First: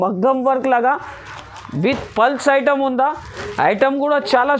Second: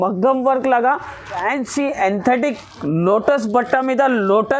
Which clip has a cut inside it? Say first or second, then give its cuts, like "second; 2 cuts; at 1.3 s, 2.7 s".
second; 1 cut; at 1.4 s